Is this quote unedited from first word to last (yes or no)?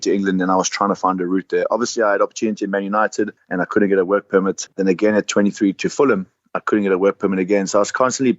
no